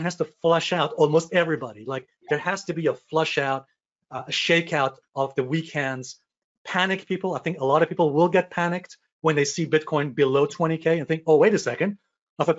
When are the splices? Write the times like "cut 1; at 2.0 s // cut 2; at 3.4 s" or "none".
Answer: none